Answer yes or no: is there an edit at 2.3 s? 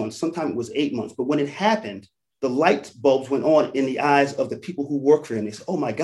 yes